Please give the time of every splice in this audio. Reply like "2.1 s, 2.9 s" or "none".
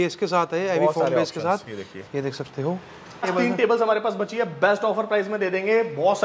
3.3 s